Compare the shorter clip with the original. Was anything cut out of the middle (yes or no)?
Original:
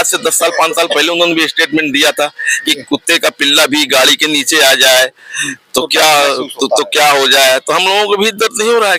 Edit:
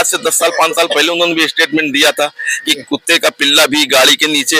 no